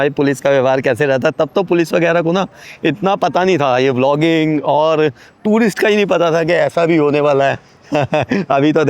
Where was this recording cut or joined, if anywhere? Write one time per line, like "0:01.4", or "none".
none